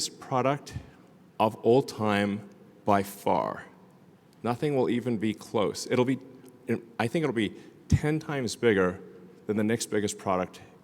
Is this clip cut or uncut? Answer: uncut